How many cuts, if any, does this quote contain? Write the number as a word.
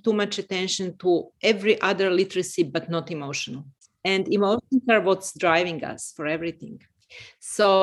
one